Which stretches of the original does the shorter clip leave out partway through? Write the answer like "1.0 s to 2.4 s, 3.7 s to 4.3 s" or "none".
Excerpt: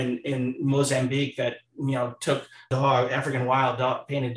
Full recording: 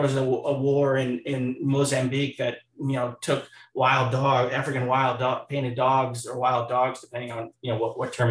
3.7 s to 4.1 s